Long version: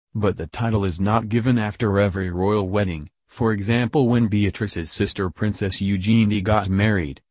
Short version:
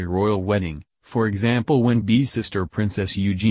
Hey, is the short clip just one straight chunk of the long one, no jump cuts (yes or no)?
no